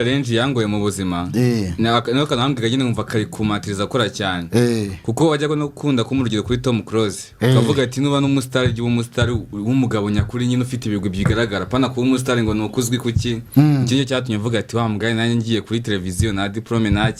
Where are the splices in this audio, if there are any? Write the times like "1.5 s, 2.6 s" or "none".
none